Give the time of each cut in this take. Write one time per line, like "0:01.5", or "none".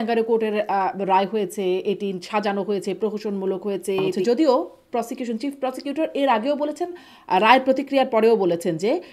0:04.2